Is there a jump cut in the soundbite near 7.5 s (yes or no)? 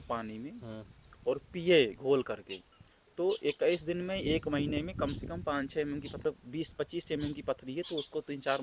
no